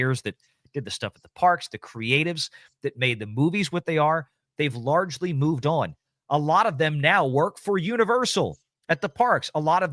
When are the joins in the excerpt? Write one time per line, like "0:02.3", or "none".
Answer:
0:08.7